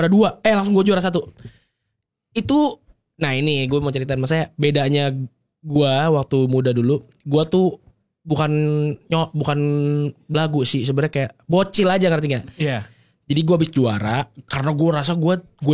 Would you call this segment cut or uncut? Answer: uncut